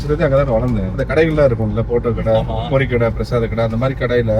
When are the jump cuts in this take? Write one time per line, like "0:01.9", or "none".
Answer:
0:01.0